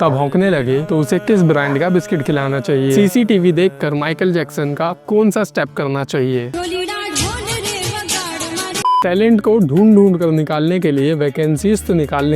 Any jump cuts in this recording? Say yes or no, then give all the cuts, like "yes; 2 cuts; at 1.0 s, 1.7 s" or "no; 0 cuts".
no; 0 cuts